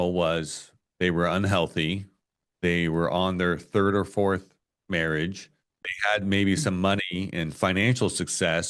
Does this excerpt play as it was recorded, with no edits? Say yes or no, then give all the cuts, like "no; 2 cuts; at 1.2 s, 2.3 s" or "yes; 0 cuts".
no; 1 cut; at 5.7 s